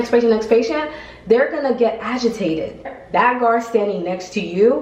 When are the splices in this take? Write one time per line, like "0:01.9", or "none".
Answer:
0:03.0